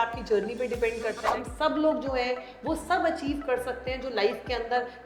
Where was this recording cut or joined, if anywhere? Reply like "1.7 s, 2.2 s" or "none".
1.3 s